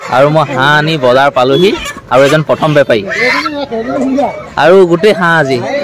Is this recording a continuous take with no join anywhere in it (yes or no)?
yes